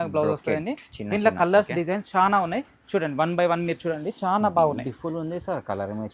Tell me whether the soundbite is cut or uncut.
uncut